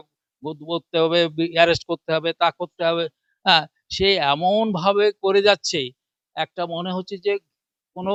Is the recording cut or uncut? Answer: uncut